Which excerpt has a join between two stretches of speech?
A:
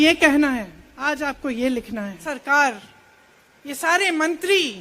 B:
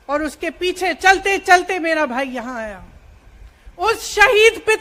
A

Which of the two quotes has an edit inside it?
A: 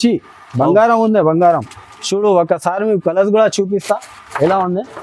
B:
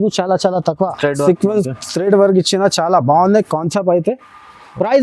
B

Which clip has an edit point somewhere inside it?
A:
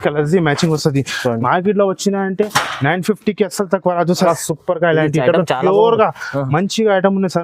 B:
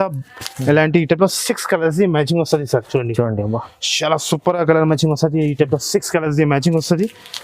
A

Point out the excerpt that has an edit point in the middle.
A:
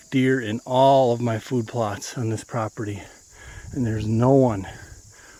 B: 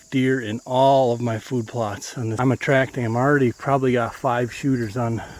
B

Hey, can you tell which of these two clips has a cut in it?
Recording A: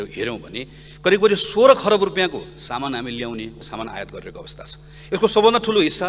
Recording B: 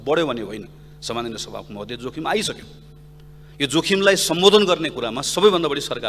A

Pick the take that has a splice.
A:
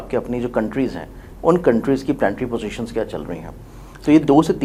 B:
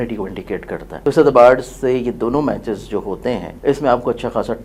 B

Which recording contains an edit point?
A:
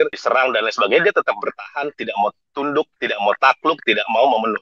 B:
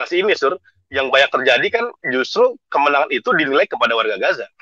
A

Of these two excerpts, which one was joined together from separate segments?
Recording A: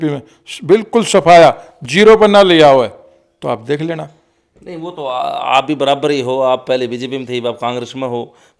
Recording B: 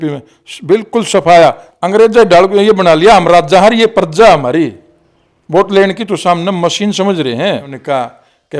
B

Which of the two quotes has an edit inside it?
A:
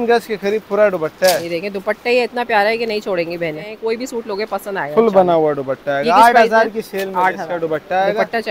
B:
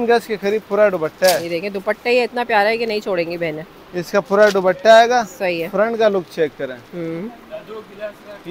A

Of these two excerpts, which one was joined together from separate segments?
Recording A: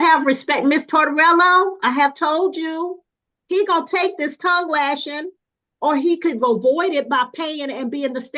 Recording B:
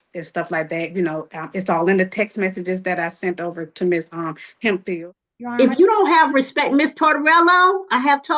B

